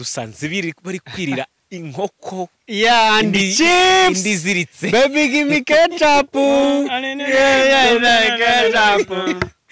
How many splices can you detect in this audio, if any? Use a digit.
0